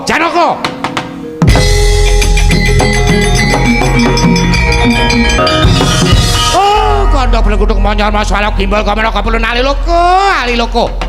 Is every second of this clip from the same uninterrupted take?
no; 1 cut; at 5.4 s

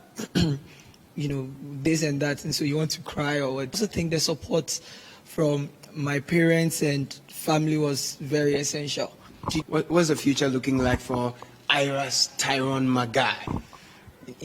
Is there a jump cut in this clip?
yes; 2 cuts; at 3.8 s, 9.5 s

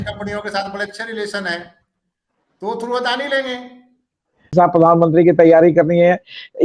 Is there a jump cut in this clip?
yes; 1 cut; at 4.5 s

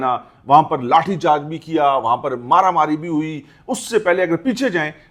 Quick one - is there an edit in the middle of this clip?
no; 0 cuts

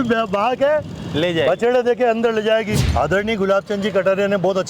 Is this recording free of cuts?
no; 1 cut; at 2.8 s

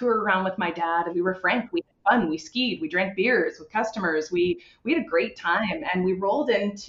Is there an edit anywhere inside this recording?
yes; 1 cut; at 1.1 s

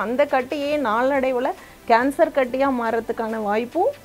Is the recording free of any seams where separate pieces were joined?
yes; 0 cuts

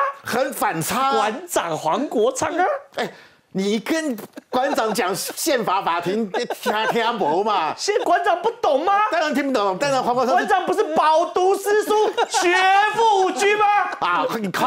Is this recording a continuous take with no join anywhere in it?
no; 1 cut; at 8.0 s

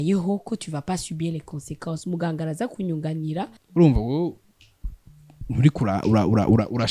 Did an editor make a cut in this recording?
yes; 1 cut; at 3.5 s

